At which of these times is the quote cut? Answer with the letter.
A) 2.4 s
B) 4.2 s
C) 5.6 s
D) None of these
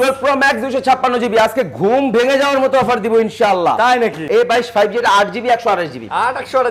B